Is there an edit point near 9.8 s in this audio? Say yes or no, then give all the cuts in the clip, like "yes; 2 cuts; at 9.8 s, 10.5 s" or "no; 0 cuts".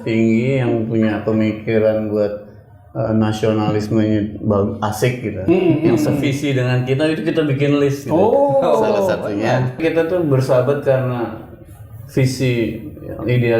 yes; 1 cut; at 9.8 s